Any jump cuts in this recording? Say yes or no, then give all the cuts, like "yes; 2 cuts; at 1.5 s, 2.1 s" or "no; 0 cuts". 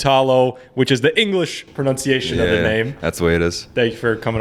no; 0 cuts